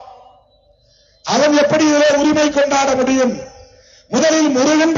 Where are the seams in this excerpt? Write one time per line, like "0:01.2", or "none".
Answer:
none